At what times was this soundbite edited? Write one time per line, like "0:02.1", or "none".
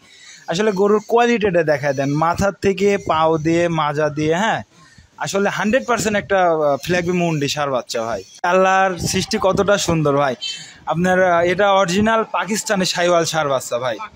0:08.4